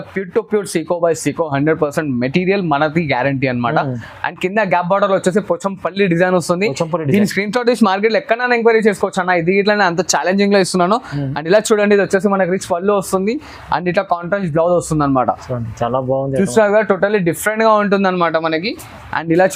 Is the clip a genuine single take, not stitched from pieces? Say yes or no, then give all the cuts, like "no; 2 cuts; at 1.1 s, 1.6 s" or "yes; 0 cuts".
yes; 0 cuts